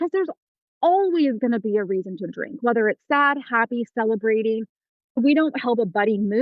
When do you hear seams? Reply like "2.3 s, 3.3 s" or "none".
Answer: 5.2 s